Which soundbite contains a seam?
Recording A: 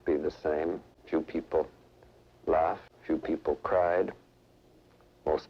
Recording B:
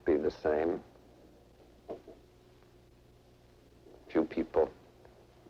A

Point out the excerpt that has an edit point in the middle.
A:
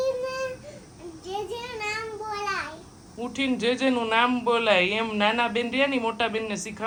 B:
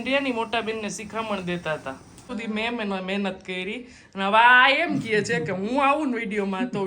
B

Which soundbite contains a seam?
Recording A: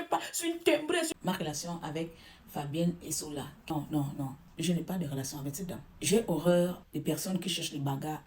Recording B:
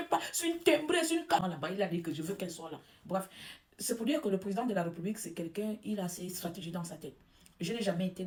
A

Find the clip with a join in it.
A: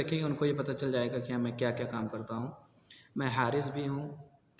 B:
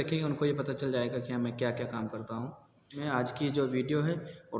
B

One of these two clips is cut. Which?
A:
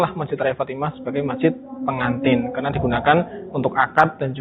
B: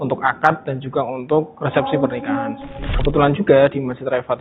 B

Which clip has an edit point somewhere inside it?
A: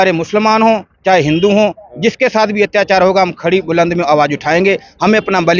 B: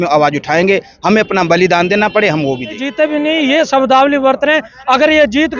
B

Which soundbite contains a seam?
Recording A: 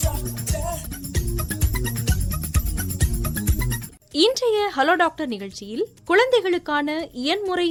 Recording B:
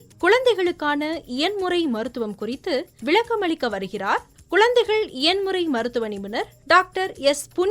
B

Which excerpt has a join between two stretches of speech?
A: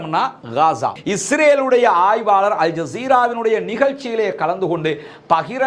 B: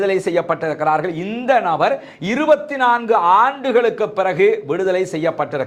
A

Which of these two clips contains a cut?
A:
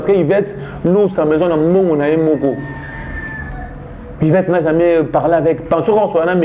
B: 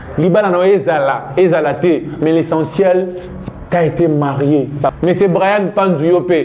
B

